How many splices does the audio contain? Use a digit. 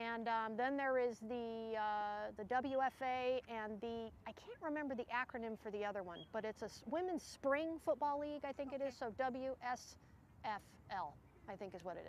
1